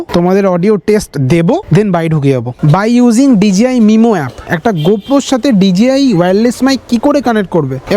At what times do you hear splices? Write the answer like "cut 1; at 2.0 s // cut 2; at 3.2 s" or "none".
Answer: cut 1; at 2.6 s // cut 2; at 4.5 s